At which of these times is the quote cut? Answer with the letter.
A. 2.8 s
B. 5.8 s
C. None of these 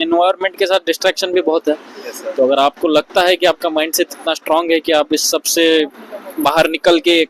C